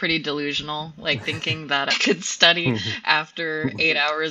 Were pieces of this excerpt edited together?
yes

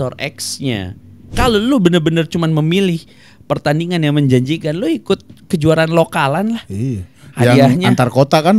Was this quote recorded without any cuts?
no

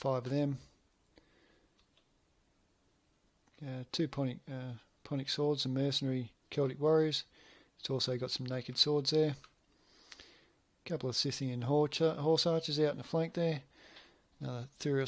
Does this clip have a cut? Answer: yes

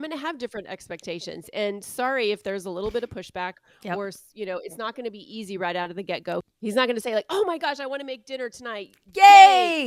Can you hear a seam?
no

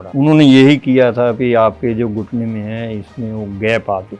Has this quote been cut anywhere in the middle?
no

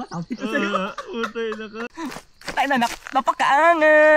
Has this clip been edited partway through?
yes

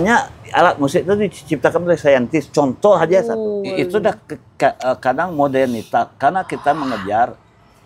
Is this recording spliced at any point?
yes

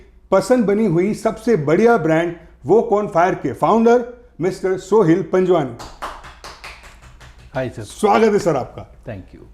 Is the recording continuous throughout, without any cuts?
yes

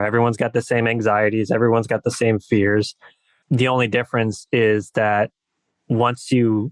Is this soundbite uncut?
yes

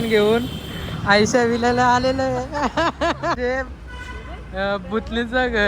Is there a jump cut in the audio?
yes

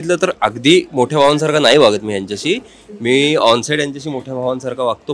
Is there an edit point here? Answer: no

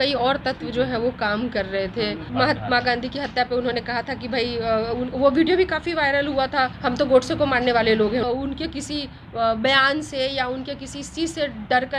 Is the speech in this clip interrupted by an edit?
yes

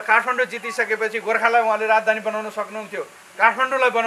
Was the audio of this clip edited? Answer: no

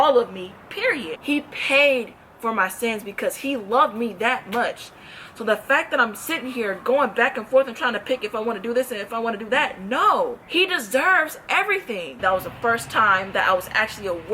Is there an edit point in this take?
yes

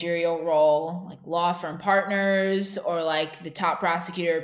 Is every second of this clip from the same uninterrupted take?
yes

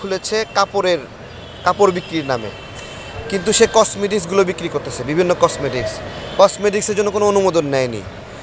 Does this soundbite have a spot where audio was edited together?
no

